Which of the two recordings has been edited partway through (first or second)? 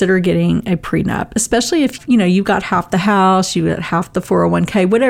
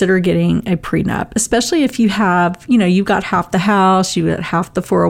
first